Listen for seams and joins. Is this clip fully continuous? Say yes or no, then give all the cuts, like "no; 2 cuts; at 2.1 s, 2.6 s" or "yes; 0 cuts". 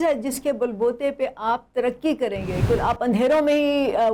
no; 1 cut; at 2.6 s